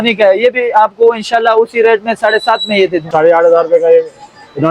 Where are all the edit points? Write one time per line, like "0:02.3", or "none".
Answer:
0:03.1